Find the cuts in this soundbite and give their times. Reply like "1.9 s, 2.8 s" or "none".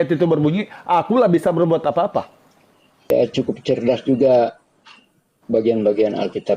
3.1 s